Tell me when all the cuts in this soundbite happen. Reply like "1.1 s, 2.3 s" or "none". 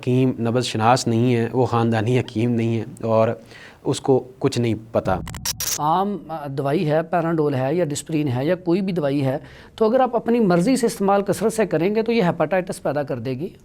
5.6 s